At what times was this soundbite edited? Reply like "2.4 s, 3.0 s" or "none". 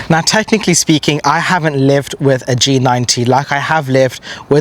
none